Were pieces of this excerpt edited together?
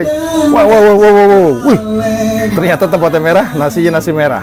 no; 0 cuts

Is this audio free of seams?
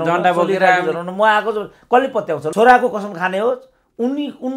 no; 1 cut; at 2.5 s

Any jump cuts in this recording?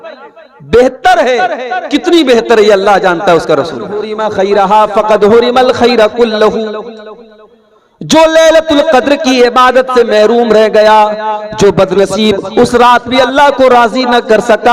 yes; 1 cut; at 4.2 s

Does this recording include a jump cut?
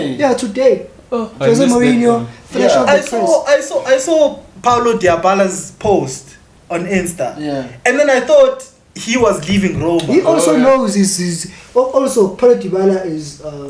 no; 0 cuts

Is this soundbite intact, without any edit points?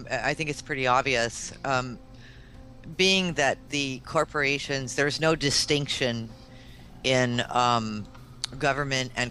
yes; 0 cuts

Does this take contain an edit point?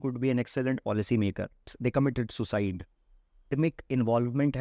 yes; 2 cuts; at 1.7 s, 3.5 s

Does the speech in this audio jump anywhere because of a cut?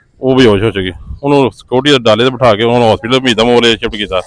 no; 0 cuts

